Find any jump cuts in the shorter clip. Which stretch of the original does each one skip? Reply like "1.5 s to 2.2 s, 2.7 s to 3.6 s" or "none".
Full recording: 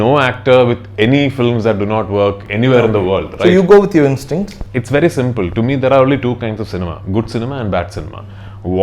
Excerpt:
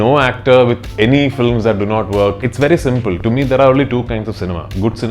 2.4 s to 4.8 s